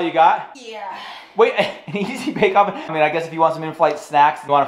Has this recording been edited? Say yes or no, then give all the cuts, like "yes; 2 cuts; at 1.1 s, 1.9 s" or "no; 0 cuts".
no; 0 cuts